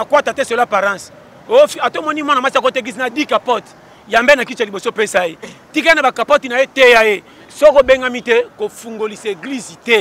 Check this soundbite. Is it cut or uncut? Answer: cut